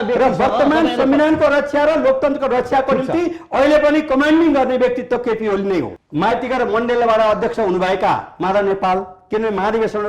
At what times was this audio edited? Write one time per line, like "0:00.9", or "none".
0:05.9